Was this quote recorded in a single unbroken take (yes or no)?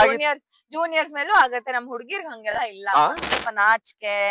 no